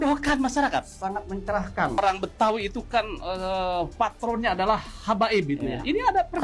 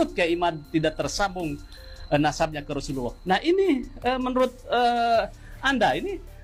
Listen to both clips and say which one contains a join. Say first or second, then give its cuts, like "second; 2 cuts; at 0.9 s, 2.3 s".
first; 1 cut; at 2.0 s